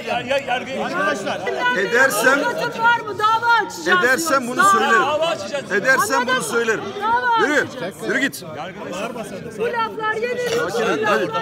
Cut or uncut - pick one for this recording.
cut